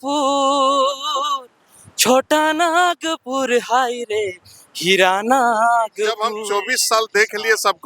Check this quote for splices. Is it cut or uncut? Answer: cut